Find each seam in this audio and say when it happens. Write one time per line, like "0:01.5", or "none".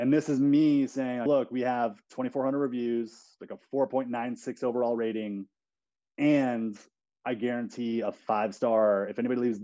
0:01.3